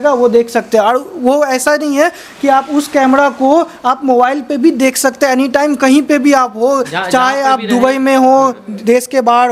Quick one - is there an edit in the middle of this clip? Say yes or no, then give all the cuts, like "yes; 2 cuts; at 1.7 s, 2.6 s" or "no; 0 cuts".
no; 0 cuts